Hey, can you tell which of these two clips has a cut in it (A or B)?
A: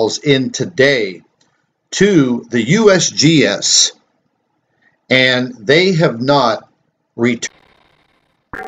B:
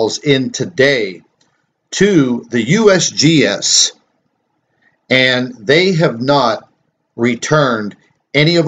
B